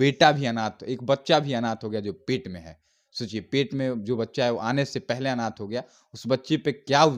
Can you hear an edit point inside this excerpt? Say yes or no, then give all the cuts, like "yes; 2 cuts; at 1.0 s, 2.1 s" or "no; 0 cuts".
no; 0 cuts